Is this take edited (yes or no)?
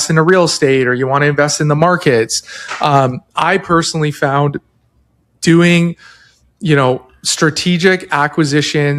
no